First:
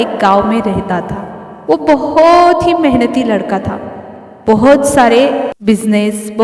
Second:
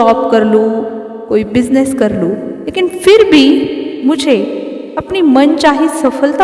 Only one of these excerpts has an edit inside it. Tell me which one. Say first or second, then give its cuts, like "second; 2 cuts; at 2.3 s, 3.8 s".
first; 1 cut; at 5.5 s